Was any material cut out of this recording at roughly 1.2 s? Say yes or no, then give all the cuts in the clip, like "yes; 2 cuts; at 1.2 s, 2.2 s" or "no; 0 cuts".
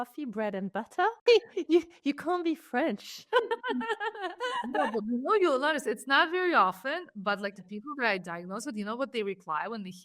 yes; 1 cut; at 1.2 s